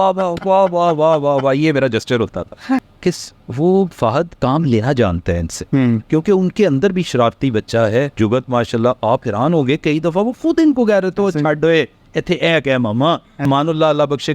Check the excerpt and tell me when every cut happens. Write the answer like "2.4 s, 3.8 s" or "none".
2.9 s, 4.3 s, 6.0 s, 8.1 s, 13.4 s